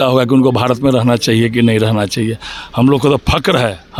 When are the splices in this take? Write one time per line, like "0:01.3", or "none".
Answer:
none